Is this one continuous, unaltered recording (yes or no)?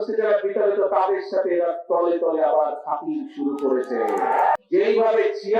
no